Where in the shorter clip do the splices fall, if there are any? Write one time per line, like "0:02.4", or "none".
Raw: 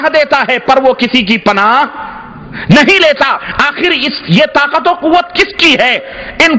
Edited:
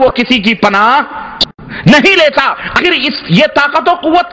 0:02.7